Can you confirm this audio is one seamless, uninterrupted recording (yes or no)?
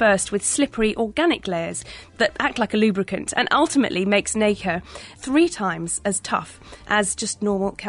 no